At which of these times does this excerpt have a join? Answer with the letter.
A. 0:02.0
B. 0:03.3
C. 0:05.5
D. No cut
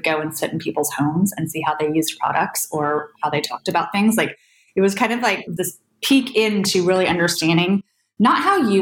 C